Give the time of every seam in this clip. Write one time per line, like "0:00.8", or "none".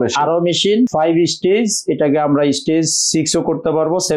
0:00.9